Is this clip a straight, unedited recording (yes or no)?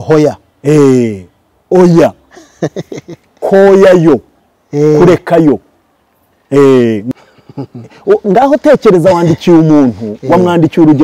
no